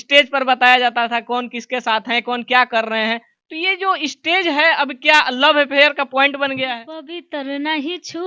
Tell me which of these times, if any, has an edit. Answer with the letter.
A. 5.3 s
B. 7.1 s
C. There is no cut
B